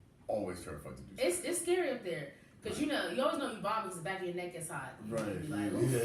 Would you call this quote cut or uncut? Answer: uncut